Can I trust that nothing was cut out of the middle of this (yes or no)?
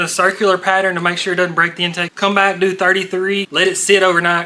no